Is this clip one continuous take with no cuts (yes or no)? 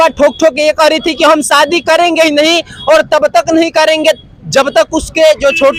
yes